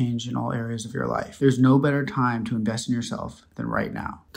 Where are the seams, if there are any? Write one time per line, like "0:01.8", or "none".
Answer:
0:01.3